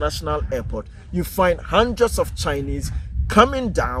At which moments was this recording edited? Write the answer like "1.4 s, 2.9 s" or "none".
none